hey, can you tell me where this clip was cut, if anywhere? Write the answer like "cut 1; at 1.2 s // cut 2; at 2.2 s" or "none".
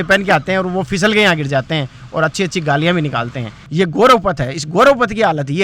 cut 1; at 3.7 s